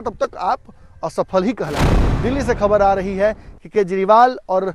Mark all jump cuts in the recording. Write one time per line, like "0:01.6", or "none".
0:01.9